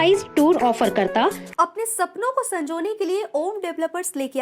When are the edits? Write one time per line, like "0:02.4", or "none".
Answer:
0:01.4